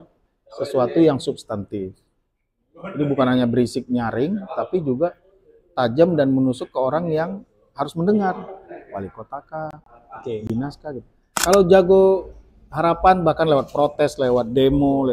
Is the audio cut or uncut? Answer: cut